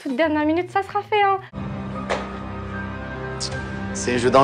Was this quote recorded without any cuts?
no; 1 cut; at 1.5 s

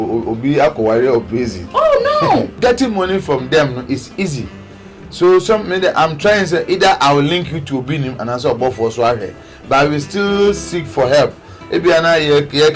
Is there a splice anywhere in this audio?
yes; 1 cut; at 2.6 s

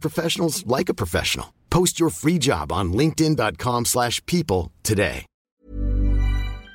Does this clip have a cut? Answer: yes; 1 cut; at 5.6 s

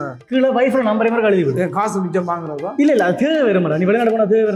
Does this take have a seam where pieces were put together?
no; 0 cuts

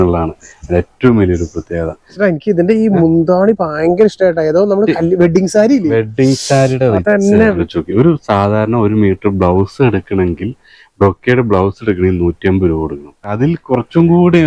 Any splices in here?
yes; 3 cuts; at 2.1 s, 7.6 s, 13.6 s

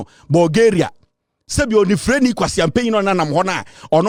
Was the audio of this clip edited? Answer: no; 0 cuts

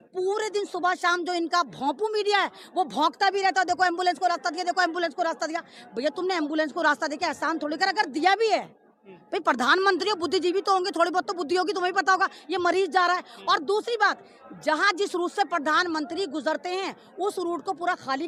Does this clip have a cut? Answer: no; 0 cuts

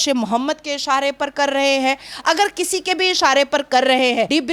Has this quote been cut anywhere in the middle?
no; 0 cuts

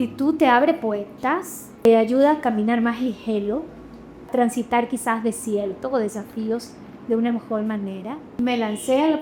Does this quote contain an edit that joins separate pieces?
yes; 3 cuts; at 1.8 s, 4.3 s, 8.4 s

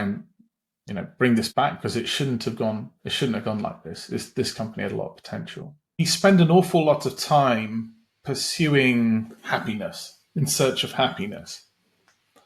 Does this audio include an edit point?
yes; 1 cut; at 6.0 s

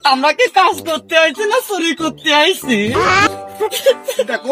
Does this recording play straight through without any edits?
yes; 0 cuts

